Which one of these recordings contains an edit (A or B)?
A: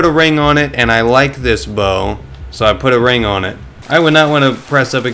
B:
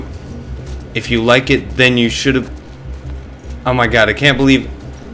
A